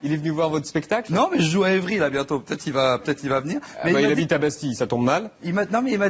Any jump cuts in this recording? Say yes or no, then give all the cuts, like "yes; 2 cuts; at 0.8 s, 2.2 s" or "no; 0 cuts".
no; 0 cuts